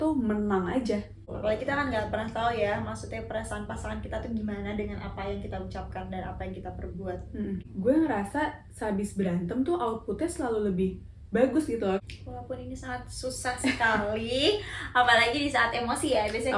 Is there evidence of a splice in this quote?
yes; 3 cuts; at 1.3 s, 7.7 s, 12.0 s

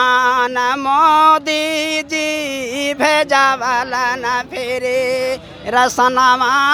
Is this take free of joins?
yes; 0 cuts

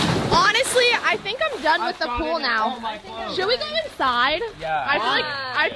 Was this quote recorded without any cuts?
yes; 0 cuts

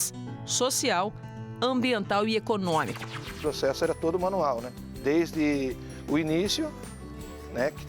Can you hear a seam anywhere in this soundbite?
yes; 1 cut; at 3.3 s

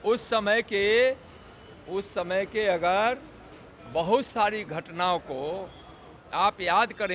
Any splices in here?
no; 0 cuts

